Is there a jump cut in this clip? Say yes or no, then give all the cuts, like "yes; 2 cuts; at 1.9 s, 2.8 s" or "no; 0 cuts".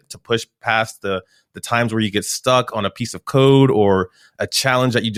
no; 0 cuts